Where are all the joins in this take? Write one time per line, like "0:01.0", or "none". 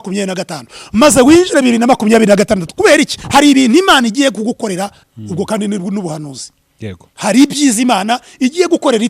0:05.0